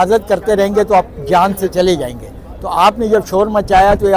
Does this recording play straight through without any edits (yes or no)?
yes